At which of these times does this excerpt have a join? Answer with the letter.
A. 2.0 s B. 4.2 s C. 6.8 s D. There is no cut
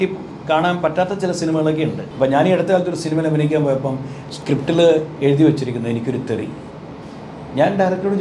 A